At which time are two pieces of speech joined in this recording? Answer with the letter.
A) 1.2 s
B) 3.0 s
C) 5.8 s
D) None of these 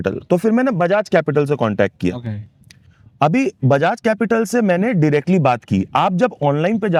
D